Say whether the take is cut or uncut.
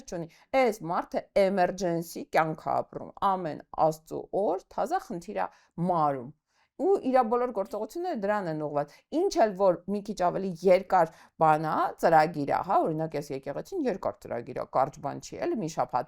uncut